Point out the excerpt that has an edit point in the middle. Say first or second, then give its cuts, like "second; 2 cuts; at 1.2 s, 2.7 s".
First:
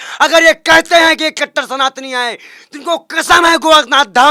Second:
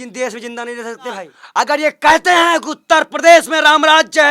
second; 1 cut; at 1.4 s